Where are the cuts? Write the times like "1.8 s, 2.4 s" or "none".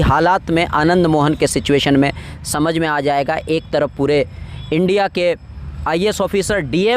none